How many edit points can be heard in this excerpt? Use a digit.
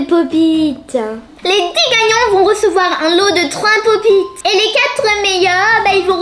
2